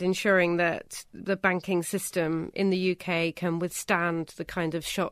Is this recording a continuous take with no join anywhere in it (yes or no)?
yes